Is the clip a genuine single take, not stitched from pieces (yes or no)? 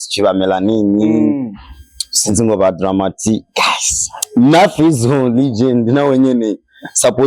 yes